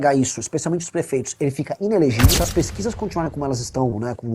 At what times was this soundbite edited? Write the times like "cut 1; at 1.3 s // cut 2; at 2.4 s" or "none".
cut 1; at 2.4 s